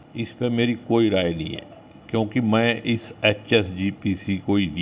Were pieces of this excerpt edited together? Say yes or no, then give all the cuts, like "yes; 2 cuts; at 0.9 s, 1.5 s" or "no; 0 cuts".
no; 0 cuts